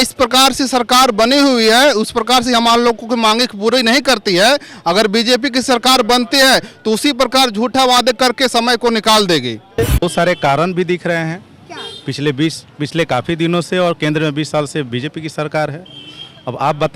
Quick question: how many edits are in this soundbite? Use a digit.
1